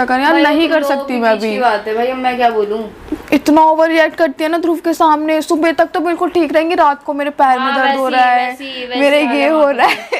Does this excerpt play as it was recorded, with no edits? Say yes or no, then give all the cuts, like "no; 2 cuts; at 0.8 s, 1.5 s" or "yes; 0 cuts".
no; 1 cut; at 3.1 s